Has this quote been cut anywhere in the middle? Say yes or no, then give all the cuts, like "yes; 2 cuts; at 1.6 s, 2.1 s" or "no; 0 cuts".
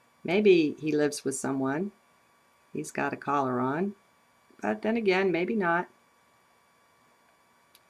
yes; 1 cut; at 3.6 s